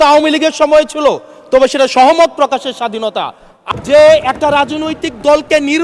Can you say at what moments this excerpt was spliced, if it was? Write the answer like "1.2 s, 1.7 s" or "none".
3.6 s